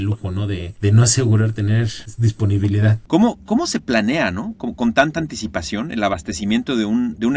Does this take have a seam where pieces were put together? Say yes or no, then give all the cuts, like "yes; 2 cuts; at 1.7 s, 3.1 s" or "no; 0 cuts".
yes; 1 cut; at 3.0 s